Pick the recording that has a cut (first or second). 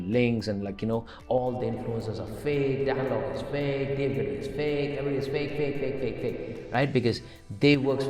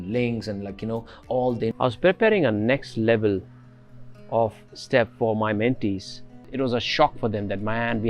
second